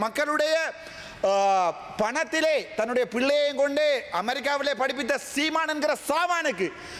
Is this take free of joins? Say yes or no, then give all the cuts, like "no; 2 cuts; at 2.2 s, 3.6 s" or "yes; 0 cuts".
yes; 0 cuts